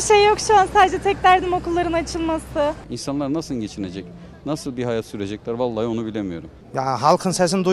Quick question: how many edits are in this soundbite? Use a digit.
2